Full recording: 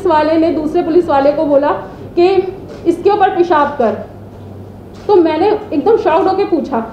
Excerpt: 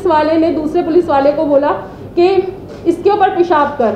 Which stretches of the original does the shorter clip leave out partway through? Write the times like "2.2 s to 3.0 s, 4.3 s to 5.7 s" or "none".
none